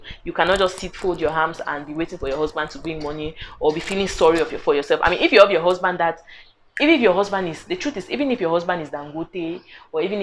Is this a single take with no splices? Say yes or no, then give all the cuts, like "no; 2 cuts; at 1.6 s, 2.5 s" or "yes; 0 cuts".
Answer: yes; 0 cuts